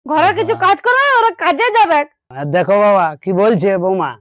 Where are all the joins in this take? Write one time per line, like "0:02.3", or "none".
0:02.4